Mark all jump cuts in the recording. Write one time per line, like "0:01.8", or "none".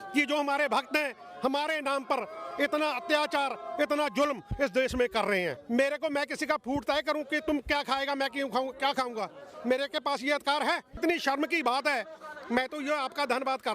0:05.6
0:11.0